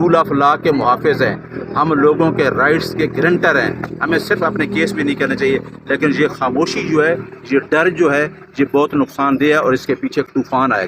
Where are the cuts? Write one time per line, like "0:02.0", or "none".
none